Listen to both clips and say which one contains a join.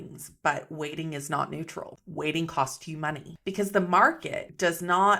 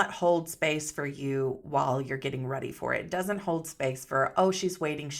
first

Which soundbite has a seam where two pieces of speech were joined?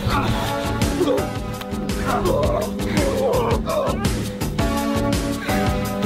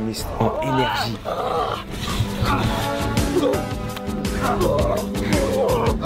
second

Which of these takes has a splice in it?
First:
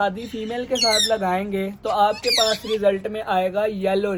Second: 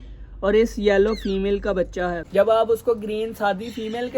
second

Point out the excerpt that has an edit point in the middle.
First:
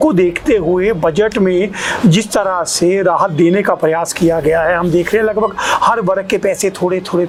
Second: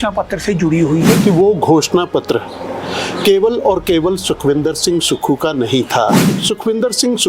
second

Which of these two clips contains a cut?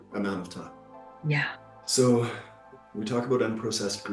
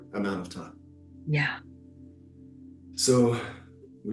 first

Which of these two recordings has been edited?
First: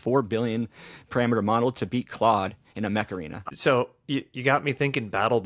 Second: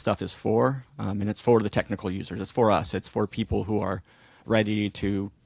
first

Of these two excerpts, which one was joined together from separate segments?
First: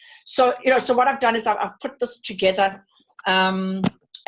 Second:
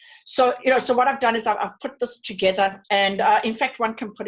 second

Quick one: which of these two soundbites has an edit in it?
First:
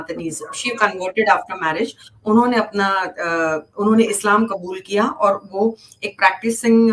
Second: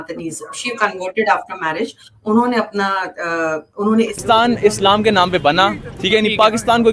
second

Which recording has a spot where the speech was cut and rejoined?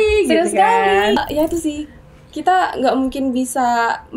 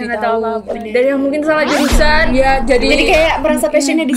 first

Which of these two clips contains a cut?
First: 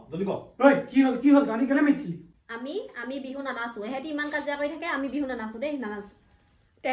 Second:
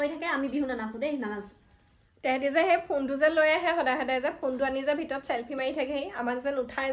first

